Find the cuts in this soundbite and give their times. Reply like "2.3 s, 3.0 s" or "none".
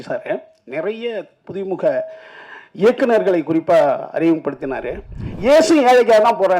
5.2 s